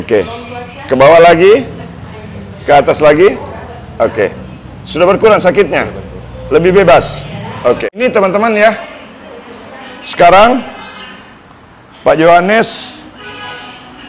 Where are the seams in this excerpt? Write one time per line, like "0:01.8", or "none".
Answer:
0:08.0